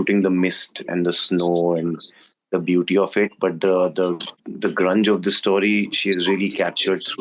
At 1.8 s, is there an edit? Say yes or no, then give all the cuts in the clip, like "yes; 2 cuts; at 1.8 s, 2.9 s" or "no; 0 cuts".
no; 1 cut; at 4.4 s